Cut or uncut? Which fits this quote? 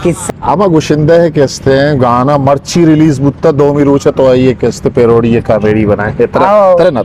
uncut